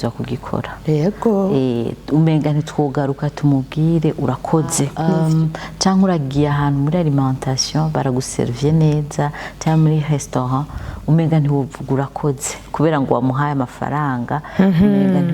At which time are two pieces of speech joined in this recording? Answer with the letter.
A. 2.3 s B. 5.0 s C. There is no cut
B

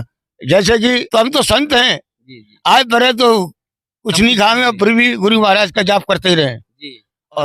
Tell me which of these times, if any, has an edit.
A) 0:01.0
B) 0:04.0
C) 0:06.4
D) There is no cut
A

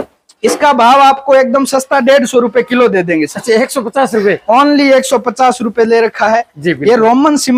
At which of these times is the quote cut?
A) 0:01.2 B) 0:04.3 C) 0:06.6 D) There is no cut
D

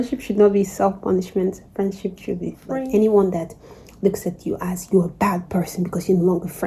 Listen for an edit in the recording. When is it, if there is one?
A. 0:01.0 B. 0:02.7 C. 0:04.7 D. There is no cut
B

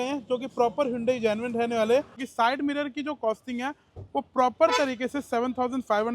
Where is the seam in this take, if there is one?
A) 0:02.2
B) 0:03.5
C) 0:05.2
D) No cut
A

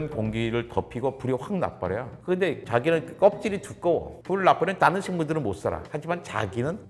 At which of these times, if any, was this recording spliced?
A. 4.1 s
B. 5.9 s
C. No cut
A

